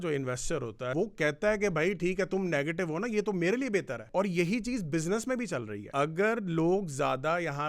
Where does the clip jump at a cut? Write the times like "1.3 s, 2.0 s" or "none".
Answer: 0.9 s, 4.1 s, 5.8 s